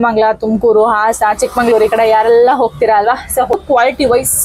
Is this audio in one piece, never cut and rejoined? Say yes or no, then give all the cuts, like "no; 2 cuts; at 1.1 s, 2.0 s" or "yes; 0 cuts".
no; 1 cut; at 3.5 s